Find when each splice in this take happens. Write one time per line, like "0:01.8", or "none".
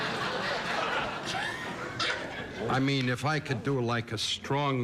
0:01.1